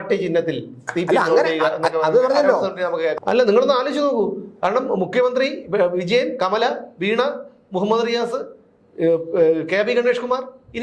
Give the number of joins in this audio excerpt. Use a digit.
1